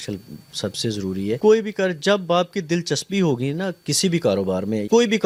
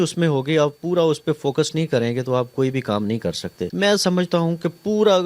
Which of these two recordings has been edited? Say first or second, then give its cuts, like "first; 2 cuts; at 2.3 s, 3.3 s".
second; 1 cut; at 3.6 s